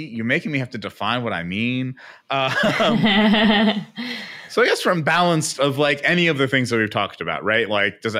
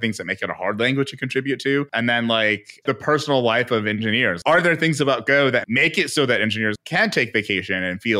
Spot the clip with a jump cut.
second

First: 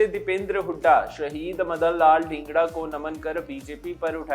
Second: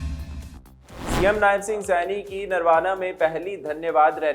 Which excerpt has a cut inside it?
second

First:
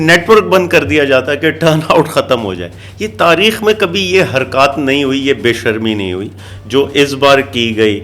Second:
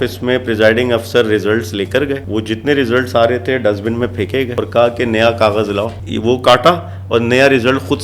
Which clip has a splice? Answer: second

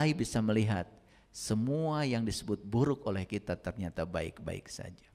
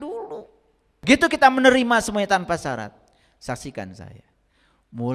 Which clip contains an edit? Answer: second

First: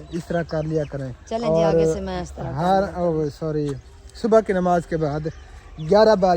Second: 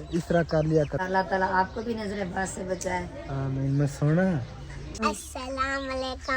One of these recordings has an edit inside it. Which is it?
second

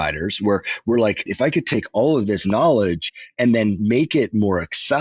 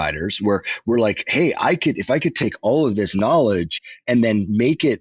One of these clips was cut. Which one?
first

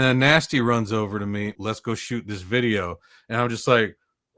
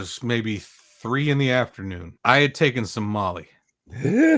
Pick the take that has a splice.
first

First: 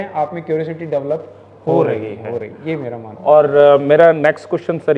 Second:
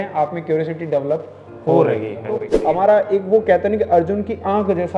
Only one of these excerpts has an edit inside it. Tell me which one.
second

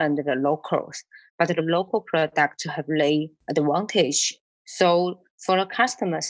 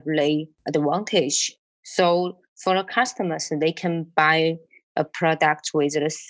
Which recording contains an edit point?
first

